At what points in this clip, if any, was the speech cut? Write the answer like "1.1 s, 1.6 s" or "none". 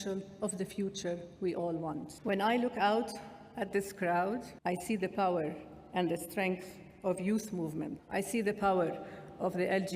2.1 s, 4.5 s, 8.0 s